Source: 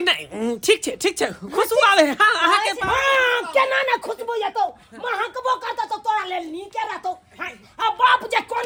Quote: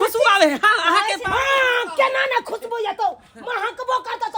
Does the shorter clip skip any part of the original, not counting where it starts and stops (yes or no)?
no